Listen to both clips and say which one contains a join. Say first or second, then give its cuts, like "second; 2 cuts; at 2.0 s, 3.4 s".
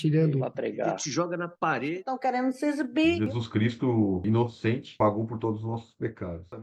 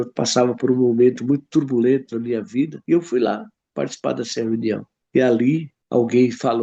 second; 3 cuts; at 2.8 s, 4.9 s, 5.8 s